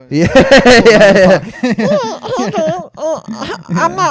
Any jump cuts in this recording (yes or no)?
no